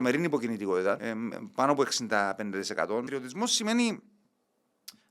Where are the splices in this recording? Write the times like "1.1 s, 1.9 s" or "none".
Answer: 1.0 s, 3.1 s